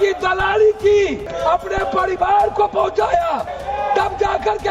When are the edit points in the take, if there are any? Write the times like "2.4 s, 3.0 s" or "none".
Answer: 1.3 s, 3.5 s